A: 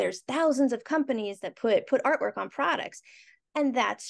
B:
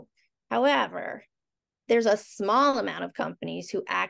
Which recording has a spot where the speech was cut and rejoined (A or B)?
A